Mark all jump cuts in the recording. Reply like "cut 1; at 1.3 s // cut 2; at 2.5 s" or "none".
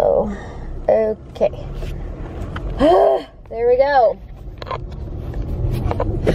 none